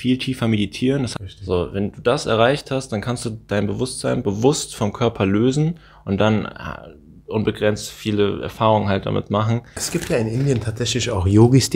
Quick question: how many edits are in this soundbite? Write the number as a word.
two